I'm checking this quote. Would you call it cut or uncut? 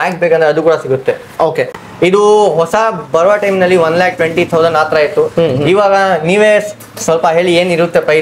cut